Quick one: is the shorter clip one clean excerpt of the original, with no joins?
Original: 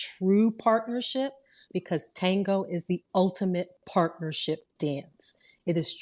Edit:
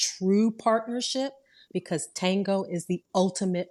yes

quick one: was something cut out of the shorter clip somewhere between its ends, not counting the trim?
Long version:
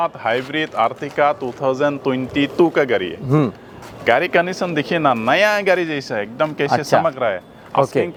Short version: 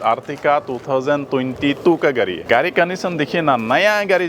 yes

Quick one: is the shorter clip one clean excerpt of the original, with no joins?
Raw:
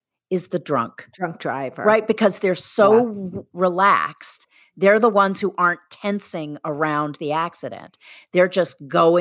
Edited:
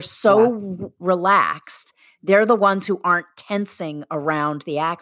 yes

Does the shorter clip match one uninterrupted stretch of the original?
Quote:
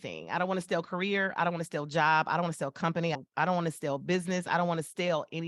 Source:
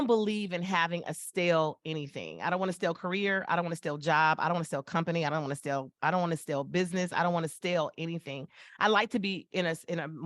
no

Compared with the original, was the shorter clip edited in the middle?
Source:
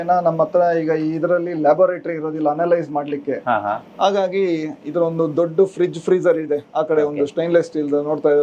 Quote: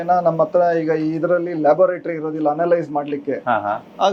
no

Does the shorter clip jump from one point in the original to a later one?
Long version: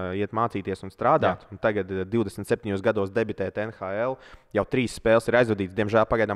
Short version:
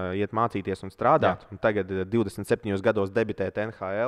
no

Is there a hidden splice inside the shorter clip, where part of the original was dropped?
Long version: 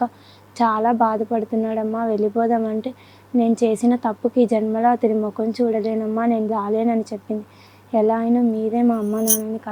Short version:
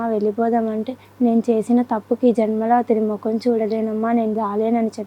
yes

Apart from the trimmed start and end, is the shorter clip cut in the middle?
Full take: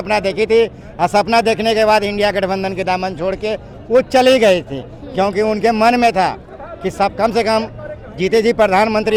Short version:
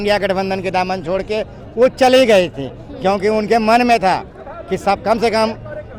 no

